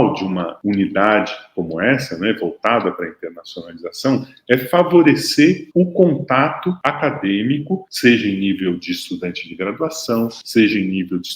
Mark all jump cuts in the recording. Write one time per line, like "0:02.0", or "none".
none